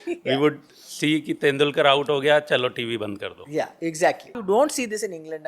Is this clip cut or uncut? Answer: cut